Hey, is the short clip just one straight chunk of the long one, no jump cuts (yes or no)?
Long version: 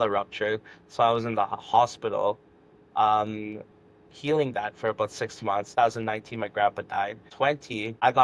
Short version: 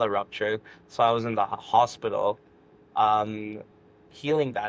yes